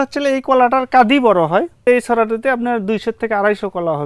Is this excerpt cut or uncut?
cut